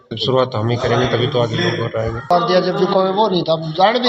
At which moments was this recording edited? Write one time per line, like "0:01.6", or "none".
0:02.3